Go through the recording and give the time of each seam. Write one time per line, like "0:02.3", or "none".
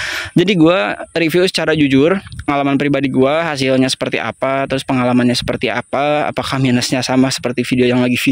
0:02.5